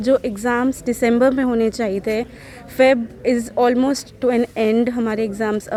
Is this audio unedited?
yes; 0 cuts

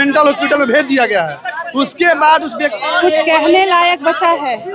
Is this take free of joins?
no; 1 cut; at 2.8 s

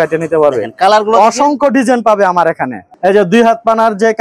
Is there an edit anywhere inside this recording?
yes; 1 cut; at 2.9 s

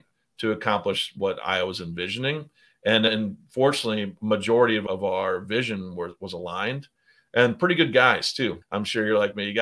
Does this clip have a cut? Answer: yes; 4 cuts; at 1.1 s, 3.1 s, 4.8 s, 8.6 s

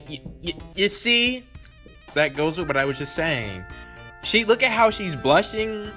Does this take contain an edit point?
yes; 1 cut; at 2.1 s

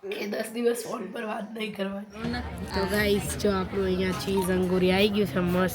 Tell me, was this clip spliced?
yes; 1 cut; at 2.2 s

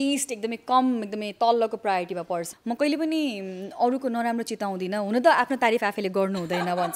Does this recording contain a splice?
yes; 1 cut; at 2.5 s

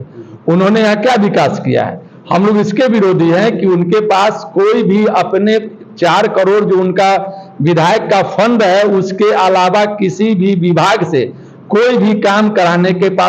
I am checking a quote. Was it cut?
no; 0 cuts

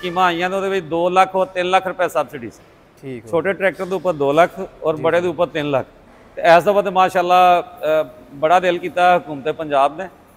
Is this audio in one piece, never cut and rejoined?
yes; 0 cuts

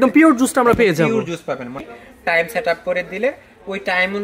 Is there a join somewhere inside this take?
yes; 1 cut; at 1.9 s

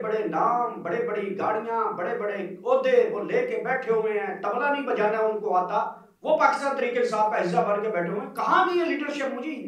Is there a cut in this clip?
no; 0 cuts

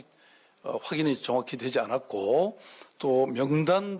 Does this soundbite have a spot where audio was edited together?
no; 0 cuts

